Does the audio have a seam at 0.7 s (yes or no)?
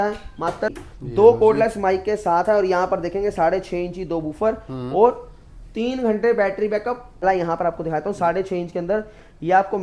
yes